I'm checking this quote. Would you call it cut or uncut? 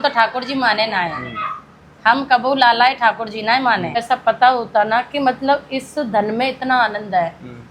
cut